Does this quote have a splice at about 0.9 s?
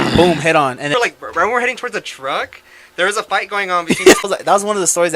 yes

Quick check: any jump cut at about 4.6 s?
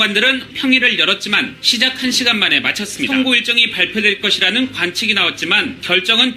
no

